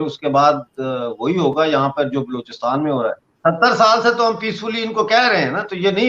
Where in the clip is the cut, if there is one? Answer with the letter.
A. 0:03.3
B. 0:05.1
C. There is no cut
A